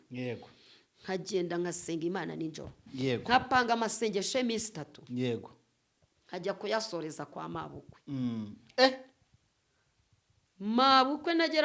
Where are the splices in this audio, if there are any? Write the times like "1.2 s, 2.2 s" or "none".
none